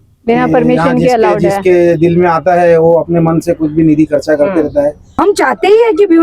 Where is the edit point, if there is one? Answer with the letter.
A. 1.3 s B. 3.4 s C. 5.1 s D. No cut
C